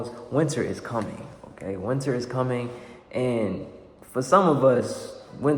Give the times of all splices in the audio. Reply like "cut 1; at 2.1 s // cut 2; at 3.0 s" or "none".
none